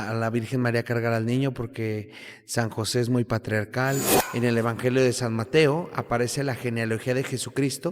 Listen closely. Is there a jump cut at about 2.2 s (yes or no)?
no